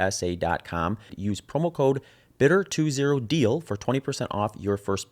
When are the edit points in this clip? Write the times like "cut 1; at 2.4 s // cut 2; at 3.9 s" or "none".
cut 1; at 1.1 s